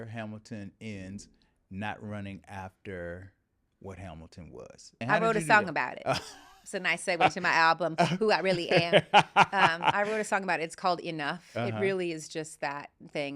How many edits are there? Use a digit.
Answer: 1